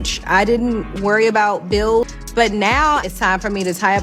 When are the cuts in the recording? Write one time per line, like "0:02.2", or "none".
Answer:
0:02.1

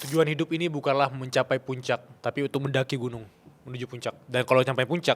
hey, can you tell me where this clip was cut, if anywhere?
0:02.1
0:04.2

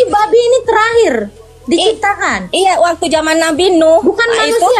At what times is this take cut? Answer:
none

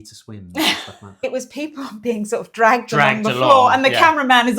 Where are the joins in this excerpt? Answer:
0:01.2

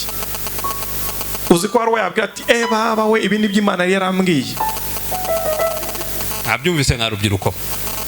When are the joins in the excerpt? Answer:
0:06.1

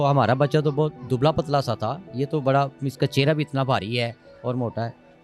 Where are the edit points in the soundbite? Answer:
none

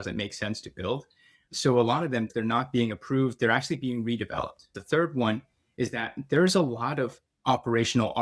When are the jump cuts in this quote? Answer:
0:04.8

